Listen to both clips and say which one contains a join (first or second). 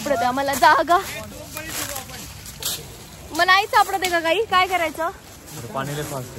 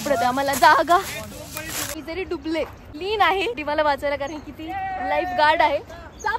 second